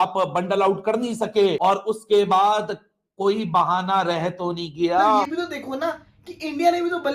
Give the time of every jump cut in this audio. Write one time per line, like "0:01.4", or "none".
0:05.3